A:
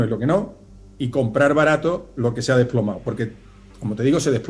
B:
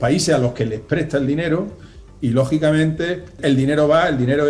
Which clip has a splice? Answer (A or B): B